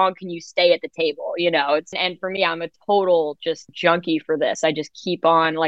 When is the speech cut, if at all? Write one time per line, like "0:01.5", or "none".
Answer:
0:01.9
0:03.7